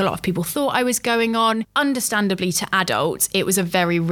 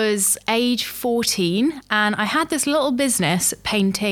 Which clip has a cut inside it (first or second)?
first